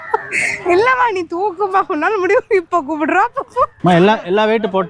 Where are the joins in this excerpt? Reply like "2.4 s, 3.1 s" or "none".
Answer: 3.7 s